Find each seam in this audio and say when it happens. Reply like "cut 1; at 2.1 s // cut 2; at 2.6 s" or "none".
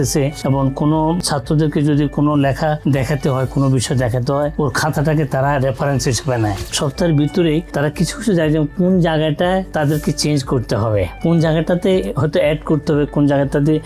cut 1; at 1.2 s // cut 2; at 6.7 s